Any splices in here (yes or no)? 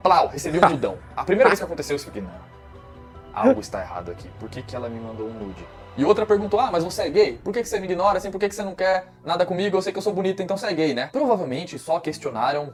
no